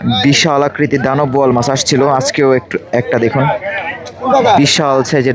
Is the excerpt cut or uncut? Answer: uncut